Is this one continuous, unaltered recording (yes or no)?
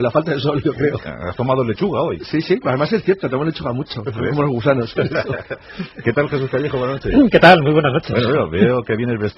no